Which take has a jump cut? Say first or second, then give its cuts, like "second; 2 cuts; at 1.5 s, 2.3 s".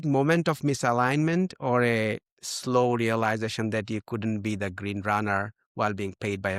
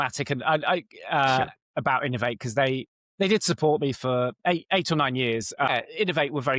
second; 1 cut; at 5.7 s